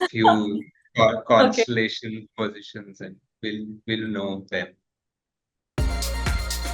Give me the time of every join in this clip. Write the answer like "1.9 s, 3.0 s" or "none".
5.6 s